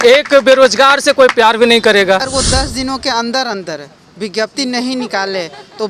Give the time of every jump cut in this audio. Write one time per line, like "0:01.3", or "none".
0:02.3